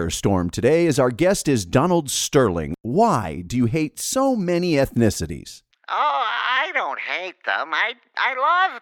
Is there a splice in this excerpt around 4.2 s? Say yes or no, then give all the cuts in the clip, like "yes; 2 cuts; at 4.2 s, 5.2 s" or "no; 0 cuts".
no; 1 cut; at 2.7 s